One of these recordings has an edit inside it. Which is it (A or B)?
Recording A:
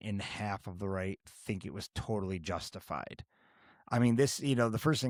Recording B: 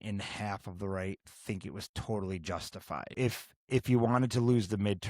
B